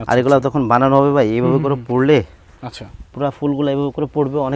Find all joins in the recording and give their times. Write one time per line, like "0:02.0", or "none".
none